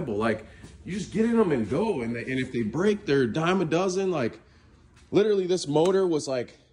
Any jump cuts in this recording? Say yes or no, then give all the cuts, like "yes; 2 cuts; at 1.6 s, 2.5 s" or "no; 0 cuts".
no; 0 cuts